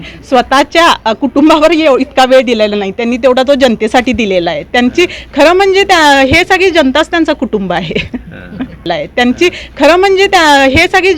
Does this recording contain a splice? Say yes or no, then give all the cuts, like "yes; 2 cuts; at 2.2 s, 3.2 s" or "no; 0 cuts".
yes; 1 cut; at 8.9 s